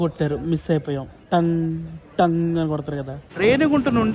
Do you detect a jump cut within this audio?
yes; 1 cut; at 3.2 s

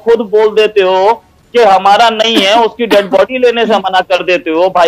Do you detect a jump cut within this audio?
no; 0 cuts

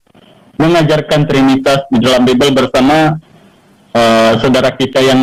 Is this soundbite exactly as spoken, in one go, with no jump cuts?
yes; 0 cuts

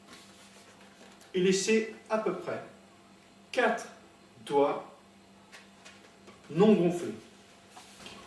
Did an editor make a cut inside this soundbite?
yes; 1 cut; at 2.8 s

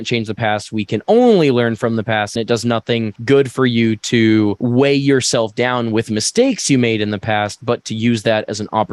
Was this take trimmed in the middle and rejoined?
no; 0 cuts

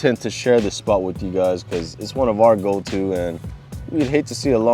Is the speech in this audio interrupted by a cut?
no; 0 cuts

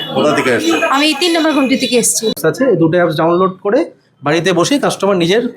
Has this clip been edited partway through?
yes; 1 cut; at 2.3 s

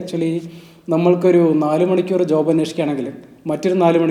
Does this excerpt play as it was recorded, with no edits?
yes; 0 cuts

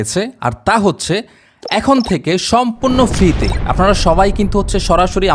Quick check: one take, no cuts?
yes; 0 cuts

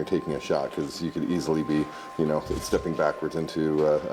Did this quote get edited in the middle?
no; 0 cuts

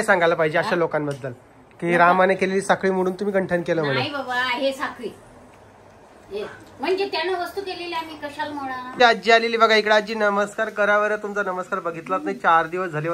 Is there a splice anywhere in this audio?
yes; 1 cut; at 8.9 s

